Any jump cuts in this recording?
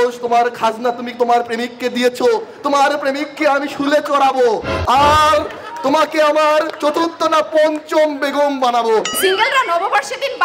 yes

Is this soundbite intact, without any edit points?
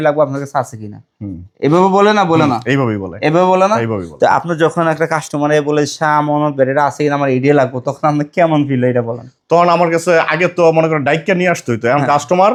yes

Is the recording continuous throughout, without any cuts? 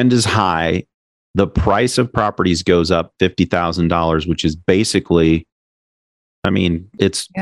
yes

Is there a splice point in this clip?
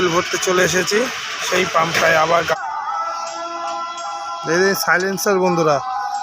yes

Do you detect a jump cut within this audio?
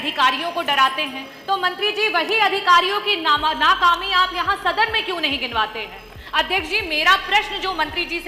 no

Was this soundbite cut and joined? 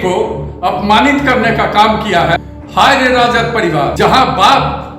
yes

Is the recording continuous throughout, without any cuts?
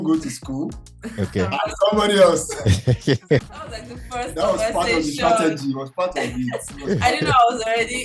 no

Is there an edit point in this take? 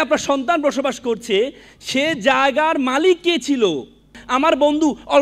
yes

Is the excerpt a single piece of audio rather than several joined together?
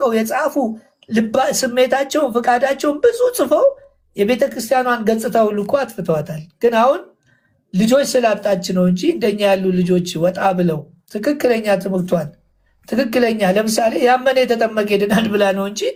yes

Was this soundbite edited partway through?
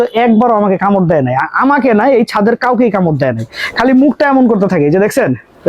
no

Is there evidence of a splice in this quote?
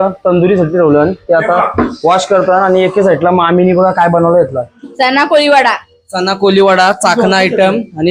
yes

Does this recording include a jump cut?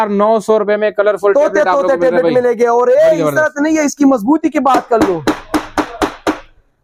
no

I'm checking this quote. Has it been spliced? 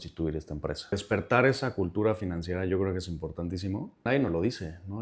yes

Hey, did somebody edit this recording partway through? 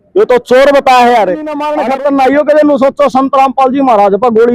yes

